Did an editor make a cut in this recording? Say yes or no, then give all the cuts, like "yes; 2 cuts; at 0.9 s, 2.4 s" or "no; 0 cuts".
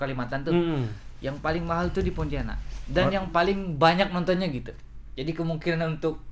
no; 0 cuts